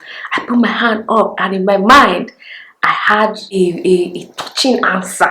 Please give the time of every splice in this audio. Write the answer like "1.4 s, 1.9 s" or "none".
none